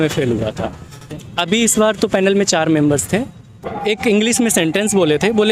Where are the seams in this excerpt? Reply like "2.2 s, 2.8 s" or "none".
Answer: 1.1 s, 3.7 s